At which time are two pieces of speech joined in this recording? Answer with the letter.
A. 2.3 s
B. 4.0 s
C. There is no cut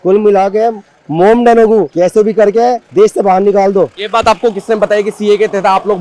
C